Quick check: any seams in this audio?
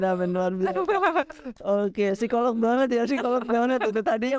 no; 0 cuts

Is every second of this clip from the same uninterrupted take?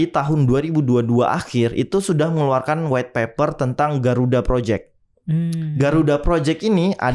yes; 0 cuts

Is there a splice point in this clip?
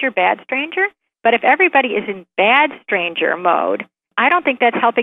yes; 1 cut; at 4.1 s

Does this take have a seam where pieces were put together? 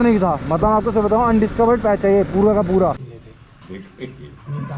yes; 1 cut; at 3.0 s

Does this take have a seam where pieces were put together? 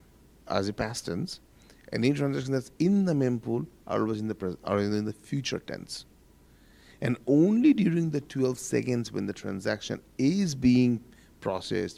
no; 0 cuts

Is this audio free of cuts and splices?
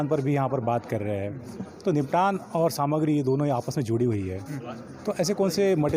yes; 0 cuts

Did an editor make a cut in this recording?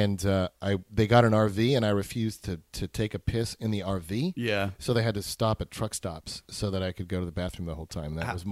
no; 0 cuts

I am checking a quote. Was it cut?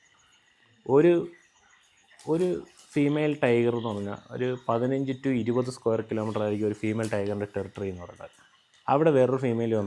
no; 0 cuts

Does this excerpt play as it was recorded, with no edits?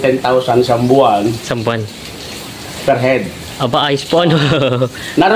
yes; 0 cuts

